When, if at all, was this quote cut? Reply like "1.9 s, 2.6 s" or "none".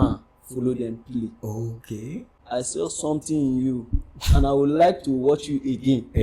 2.3 s